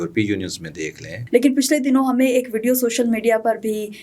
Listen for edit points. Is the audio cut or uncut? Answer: cut